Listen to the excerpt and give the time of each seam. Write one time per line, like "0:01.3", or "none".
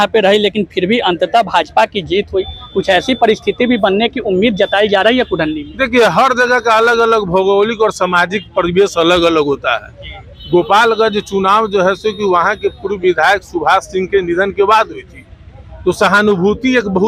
none